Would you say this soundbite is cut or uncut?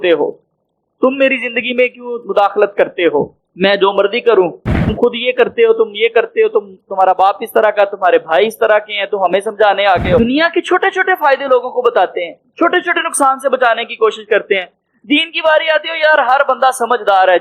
cut